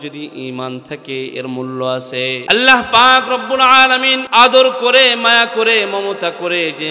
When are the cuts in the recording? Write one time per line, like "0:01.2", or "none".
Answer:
0:02.4
0:04.2